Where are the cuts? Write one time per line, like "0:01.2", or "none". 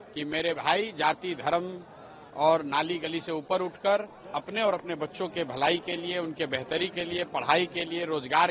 none